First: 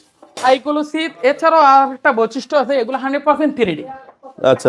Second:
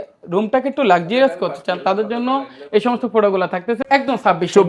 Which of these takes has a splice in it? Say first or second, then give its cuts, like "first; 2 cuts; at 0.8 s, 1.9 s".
second; 1 cut; at 3.8 s